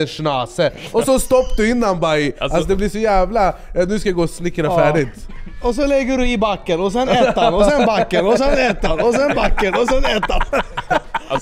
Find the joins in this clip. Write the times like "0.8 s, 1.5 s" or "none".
2.4 s